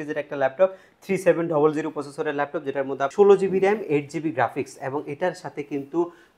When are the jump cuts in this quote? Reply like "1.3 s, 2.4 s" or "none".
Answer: 3.1 s